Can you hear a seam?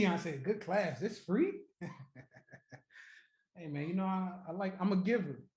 no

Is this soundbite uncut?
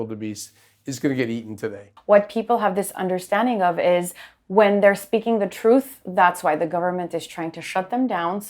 no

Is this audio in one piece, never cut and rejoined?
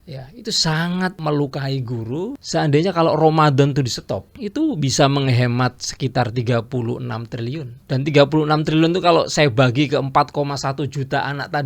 no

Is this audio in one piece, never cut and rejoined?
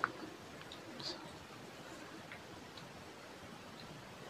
yes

